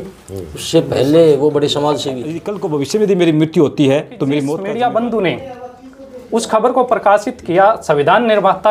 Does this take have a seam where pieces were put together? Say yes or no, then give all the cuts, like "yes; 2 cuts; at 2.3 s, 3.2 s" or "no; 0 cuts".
yes; 2 cuts; at 2.5 s, 4.5 s